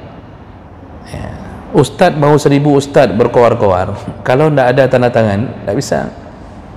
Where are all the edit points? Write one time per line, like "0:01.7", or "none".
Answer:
none